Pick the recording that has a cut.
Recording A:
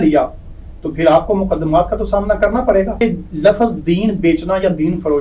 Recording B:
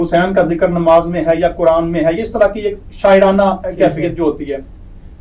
A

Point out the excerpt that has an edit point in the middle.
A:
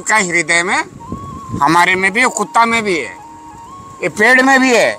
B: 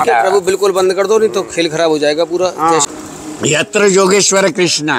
B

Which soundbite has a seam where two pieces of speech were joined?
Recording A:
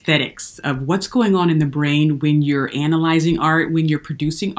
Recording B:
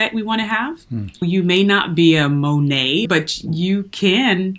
B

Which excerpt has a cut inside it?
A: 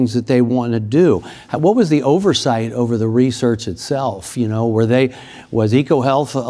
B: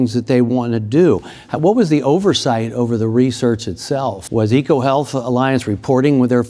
B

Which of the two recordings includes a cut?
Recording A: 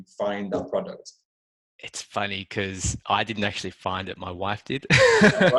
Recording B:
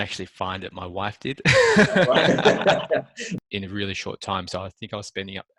B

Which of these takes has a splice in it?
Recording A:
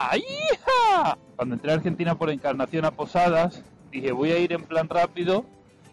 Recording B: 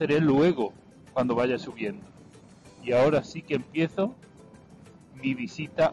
A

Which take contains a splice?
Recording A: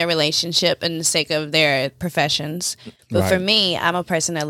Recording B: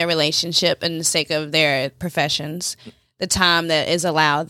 A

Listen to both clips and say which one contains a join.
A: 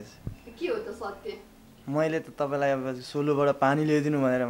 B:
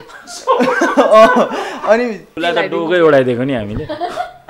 B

